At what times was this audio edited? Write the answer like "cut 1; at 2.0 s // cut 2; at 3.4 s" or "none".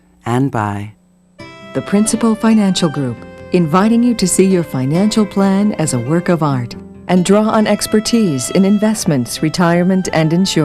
cut 1; at 1.0 s